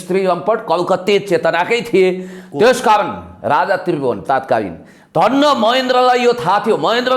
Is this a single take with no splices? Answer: yes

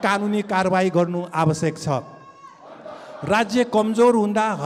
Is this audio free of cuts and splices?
yes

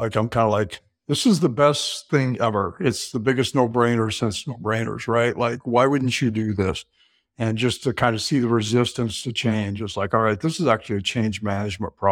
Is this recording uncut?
yes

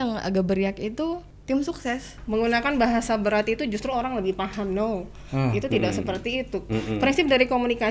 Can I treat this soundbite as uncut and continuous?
no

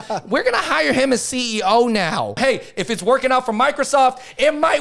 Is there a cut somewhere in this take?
yes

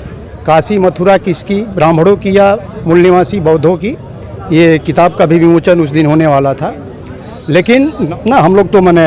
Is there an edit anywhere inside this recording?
yes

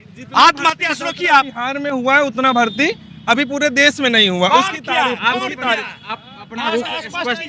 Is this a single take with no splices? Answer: yes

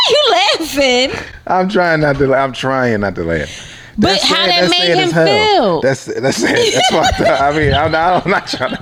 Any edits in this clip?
no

